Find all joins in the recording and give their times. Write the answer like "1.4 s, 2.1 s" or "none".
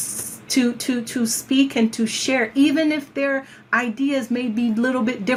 none